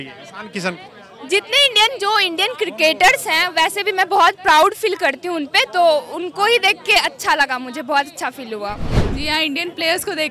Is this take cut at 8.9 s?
yes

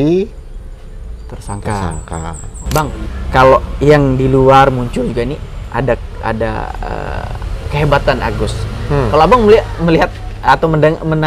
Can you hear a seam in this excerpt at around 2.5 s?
yes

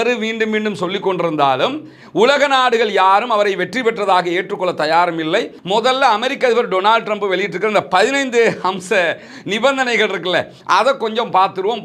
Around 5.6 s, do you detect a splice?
yes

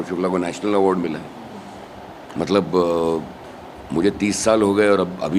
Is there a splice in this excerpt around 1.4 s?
no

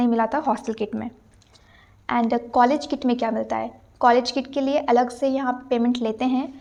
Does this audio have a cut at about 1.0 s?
no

